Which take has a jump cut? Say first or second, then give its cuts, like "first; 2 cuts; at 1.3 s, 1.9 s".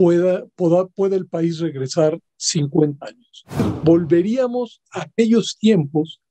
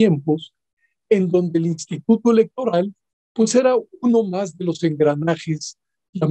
first; 1 cut; at 3.6 s